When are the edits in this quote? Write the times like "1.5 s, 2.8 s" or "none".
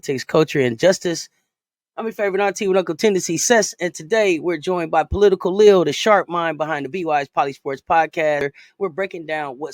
8.4 s